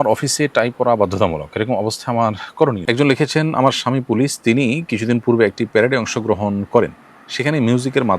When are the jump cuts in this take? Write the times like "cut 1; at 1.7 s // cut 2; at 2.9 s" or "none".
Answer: cut 1; at 2.8 s